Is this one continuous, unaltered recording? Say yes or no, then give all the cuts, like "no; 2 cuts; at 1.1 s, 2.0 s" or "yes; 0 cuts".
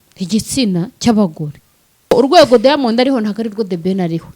no; 1 cut; at 2.1 s